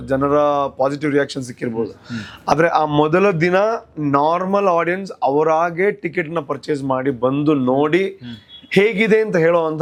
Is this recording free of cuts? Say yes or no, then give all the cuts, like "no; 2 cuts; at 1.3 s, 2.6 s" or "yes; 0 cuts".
yes; 0 cuts